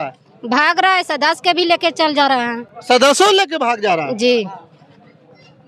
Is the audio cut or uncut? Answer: uncut